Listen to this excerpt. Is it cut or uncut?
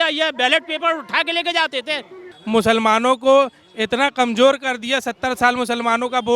cut